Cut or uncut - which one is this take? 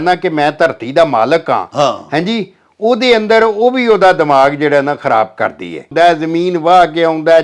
cut